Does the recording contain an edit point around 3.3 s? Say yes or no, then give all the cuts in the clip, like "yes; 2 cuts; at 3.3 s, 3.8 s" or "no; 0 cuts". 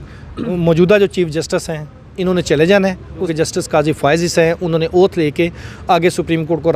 yes; 1 cut; at 3.3 s